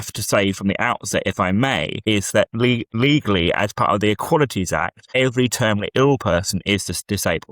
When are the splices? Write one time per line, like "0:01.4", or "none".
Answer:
0:01.9
0:03.0
0:05.0